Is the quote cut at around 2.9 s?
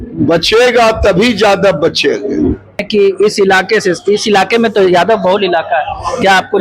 yes; 1 cut; at 2.9 s

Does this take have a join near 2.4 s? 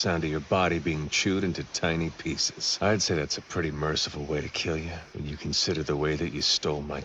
yes; 2 cuts; at 2.4 s, 5.0 s

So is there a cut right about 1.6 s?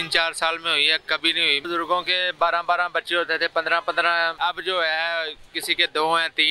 yes; 2 cuts; at 1.6 s, 4.4 s

